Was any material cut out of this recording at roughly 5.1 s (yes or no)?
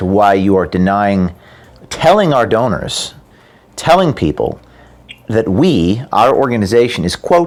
no